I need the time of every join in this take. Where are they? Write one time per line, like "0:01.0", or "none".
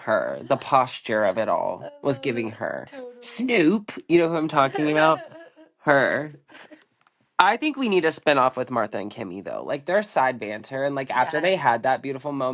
none